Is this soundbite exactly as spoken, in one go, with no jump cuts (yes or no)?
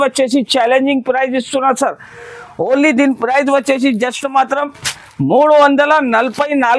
yes